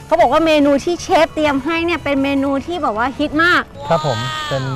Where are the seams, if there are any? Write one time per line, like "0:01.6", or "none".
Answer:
0:03.8